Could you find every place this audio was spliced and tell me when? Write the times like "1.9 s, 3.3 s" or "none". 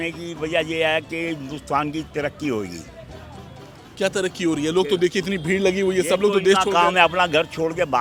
none